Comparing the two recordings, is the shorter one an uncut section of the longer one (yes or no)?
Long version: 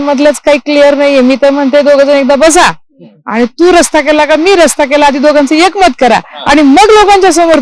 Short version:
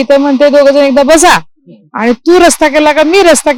yes